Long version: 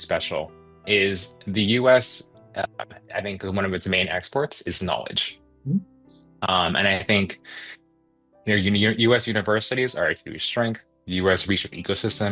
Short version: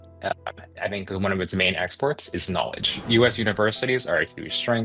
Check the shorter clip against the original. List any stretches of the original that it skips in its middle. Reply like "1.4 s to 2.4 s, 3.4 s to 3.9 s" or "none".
5.4 s to 9.0 s